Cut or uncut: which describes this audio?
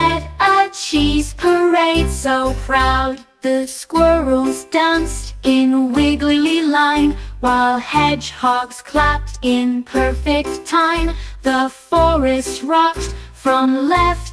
uncut